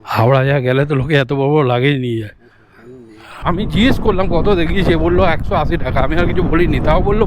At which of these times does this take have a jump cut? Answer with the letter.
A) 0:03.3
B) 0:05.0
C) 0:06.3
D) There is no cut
A